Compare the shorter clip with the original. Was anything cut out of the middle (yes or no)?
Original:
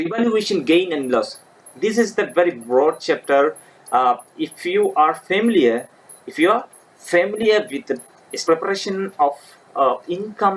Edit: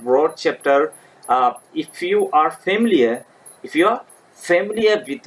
no